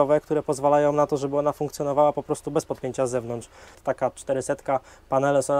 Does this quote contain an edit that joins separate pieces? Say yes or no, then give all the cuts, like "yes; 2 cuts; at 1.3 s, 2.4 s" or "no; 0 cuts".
yes; 1 cut; at 3.8 s